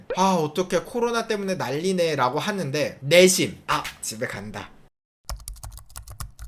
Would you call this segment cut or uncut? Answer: cut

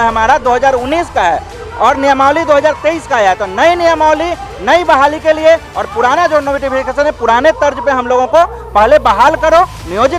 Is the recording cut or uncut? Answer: uncut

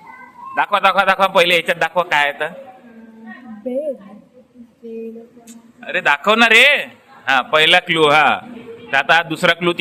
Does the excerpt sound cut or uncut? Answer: uncut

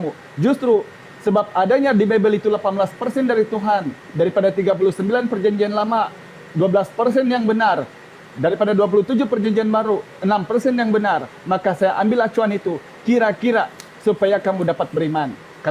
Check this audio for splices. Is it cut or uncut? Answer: uncut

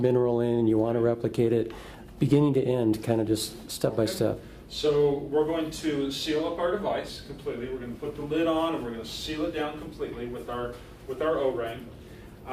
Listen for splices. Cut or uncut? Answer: cut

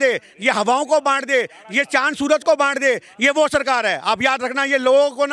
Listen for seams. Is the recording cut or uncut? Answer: uncut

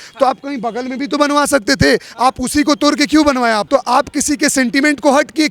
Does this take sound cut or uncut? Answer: cut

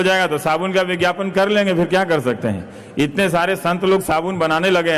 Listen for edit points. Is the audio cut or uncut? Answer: uncut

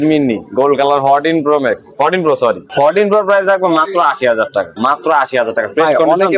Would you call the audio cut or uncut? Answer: uncut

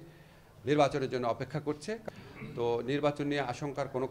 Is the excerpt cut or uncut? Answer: cut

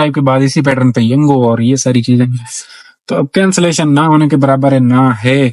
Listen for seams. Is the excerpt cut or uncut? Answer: uncut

